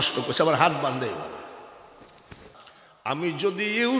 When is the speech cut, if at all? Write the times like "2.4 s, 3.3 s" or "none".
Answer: 2.6 s